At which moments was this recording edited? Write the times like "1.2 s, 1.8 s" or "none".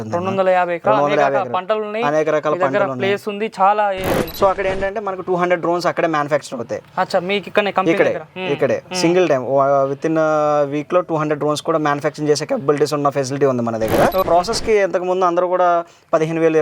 4.3 s, 14.3 s